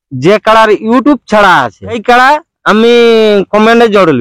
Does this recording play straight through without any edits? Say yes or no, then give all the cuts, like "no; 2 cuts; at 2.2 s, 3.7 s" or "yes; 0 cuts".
no; 1 cut; at 2.0 s